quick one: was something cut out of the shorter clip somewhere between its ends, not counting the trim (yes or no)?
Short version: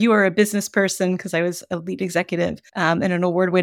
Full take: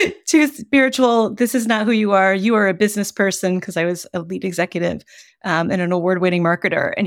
yes